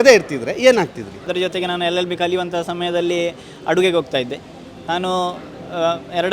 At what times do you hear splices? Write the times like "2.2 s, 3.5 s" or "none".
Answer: 1.2 s